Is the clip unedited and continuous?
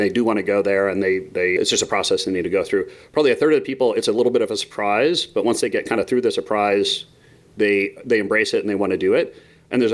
yes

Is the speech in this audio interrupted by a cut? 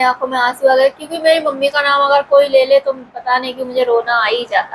no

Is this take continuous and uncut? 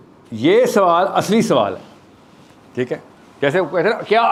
yes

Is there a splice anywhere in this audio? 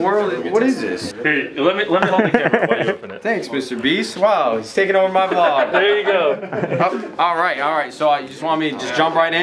no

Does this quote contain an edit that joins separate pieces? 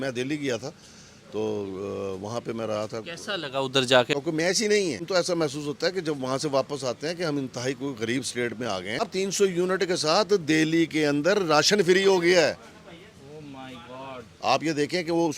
yes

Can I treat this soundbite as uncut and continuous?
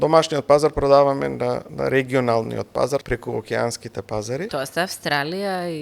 no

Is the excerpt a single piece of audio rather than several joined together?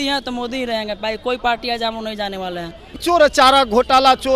no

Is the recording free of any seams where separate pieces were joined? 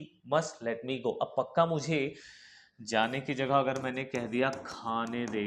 yes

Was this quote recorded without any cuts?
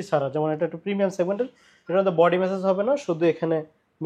yes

